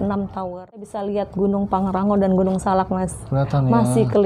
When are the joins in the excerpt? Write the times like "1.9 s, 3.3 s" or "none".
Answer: 0.9 s